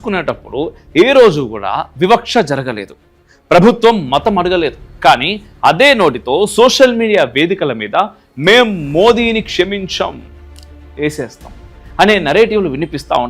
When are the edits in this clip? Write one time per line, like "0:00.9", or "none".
0:11.9